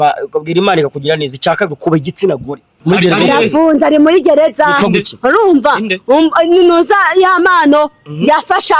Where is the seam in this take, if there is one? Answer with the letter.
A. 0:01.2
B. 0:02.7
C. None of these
B